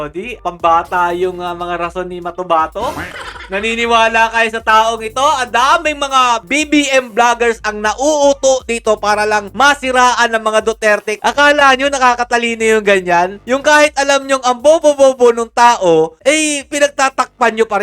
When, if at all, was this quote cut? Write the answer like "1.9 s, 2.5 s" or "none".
none